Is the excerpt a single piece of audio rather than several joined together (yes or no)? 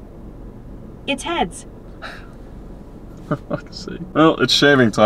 no